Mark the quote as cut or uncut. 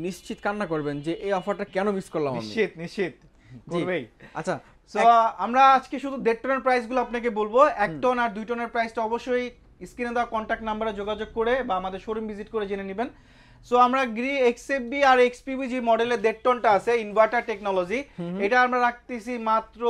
uncut